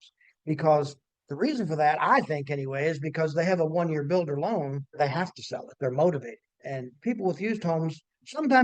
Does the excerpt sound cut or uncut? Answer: cut